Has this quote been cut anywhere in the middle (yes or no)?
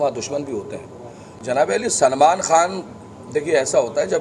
yes